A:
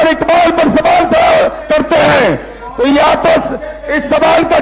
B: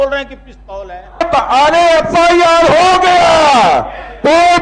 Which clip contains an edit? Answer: B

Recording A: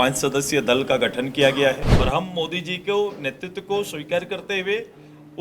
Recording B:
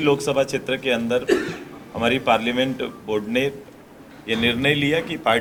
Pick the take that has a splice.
A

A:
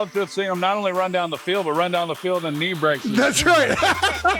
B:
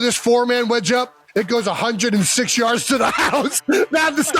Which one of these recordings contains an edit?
A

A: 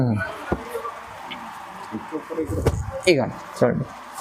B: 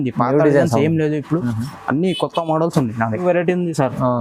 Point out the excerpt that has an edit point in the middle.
B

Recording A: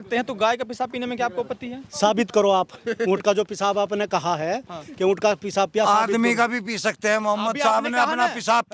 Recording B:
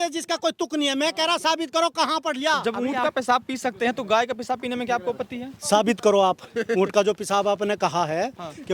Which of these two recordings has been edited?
B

